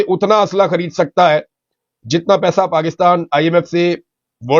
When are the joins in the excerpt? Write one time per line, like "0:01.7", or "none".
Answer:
none